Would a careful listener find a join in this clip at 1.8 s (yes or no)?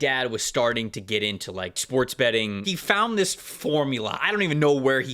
yes